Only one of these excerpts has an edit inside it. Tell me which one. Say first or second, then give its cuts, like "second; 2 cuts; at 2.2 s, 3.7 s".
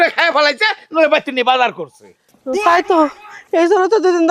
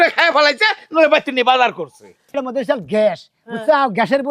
second; 1 cut; at 2.4 s